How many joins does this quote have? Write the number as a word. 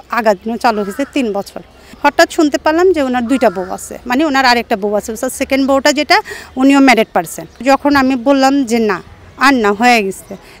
two